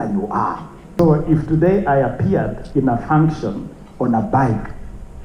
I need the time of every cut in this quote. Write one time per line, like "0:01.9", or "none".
0:00.9